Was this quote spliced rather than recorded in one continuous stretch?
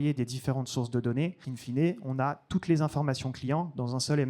yes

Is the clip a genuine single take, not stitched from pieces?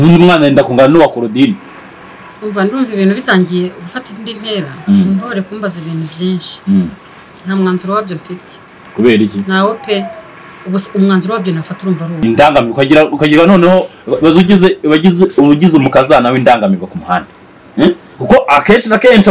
no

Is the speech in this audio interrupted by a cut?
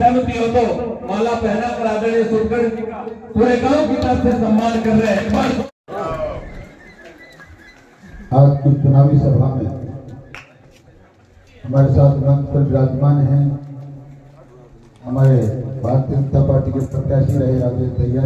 yes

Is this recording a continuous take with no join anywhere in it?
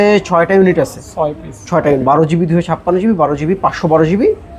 no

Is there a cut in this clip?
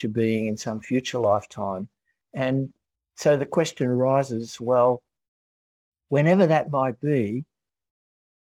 no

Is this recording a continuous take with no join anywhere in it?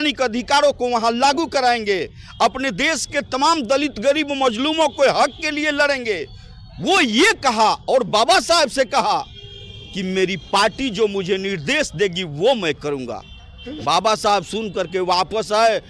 yes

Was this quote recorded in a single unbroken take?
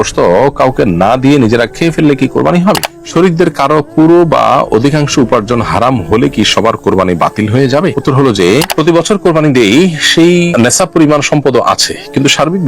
no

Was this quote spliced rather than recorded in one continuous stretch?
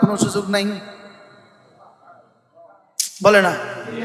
no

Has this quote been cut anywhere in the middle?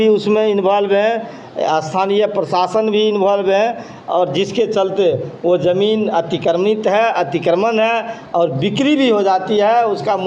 no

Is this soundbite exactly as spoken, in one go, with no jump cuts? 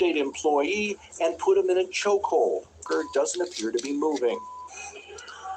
no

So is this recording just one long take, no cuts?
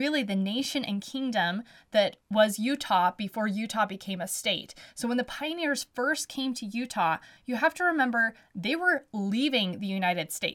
yes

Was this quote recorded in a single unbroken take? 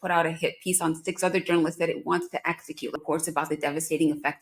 no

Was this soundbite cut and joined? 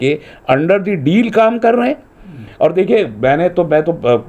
no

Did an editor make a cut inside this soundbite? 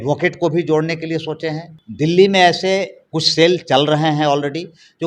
yes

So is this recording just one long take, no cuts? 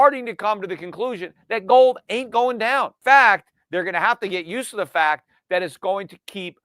no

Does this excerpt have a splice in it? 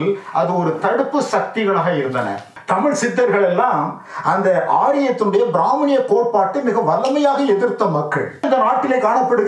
yes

